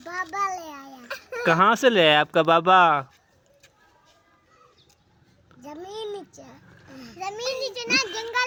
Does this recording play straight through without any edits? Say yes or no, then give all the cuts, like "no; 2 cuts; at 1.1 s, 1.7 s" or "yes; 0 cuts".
yes; 0 cuts